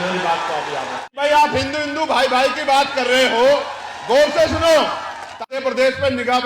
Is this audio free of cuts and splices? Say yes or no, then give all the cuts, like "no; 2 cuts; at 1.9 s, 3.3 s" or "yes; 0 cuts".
no; 2 cuts; at 1.0 s, 5.4 s